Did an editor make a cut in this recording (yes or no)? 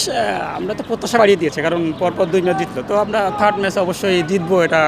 no